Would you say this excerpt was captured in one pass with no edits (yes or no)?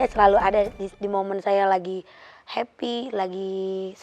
yes